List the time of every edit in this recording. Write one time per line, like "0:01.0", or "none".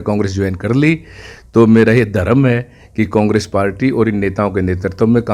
none